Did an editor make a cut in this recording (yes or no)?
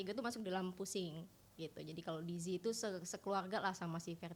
no